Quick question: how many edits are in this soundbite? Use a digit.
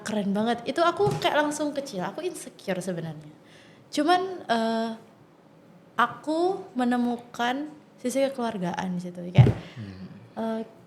0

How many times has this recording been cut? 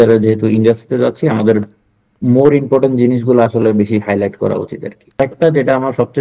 1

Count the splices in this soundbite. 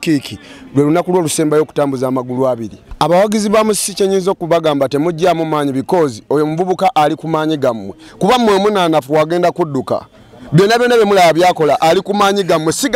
1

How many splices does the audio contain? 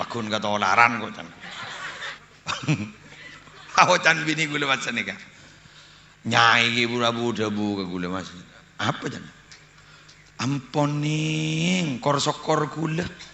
1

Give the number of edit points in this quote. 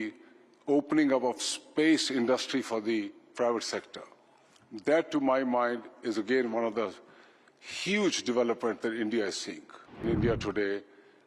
1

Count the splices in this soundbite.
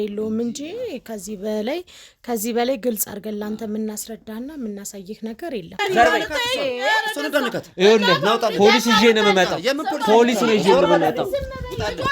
1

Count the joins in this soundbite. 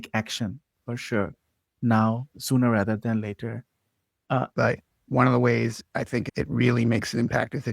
1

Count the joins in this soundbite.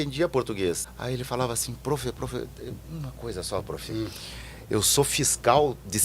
1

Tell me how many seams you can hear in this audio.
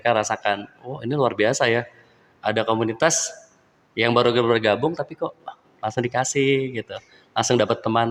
0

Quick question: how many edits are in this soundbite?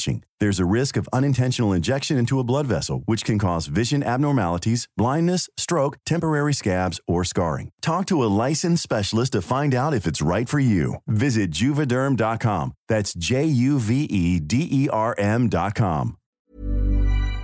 1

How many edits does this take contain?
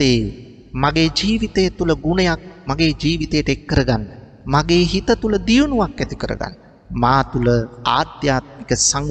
0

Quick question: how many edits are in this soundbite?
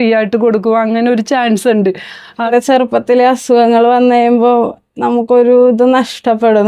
1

